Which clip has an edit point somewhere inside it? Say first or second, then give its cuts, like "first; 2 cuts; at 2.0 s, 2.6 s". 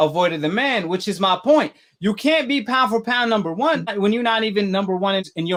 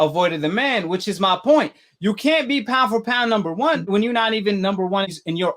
second; 1 cut; at 3.8 s